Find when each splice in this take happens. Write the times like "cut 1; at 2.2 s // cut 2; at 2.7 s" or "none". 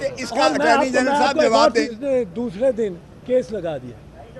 cut 1; at 1.9 s